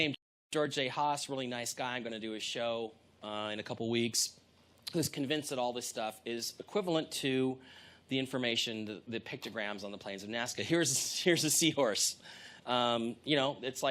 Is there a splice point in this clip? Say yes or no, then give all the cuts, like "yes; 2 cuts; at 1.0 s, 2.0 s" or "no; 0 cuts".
yes; 1 cut; at 10.3 s